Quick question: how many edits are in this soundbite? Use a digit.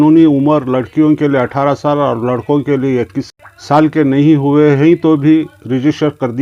1